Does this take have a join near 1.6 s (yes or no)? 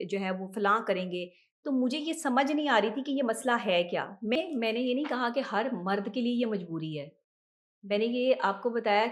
no